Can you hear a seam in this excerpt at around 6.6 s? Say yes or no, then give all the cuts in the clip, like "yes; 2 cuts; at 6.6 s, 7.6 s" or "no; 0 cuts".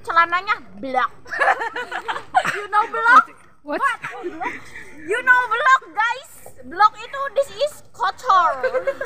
no; 1 cut; at 4.7 s